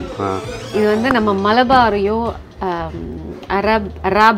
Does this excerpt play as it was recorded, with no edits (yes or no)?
yes